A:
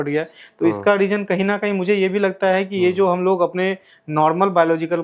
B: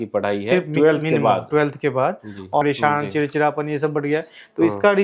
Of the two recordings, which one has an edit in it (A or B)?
B